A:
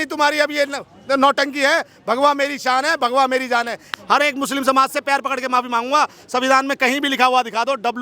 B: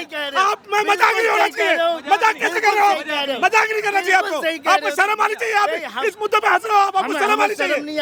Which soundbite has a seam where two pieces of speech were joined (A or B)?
A